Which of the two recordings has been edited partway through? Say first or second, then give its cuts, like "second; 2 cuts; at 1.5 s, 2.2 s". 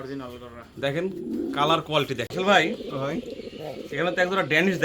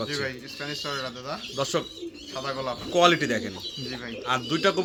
first; 1 cut; at 2.3 s